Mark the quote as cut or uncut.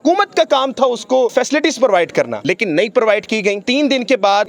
cut